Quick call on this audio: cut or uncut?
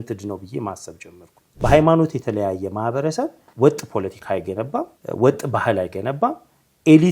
cut